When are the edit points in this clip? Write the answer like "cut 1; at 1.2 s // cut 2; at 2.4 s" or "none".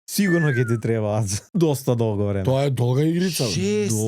cut 1; at 1.4 s